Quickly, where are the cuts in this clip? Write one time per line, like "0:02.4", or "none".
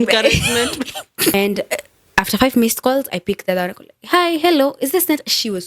0:01.3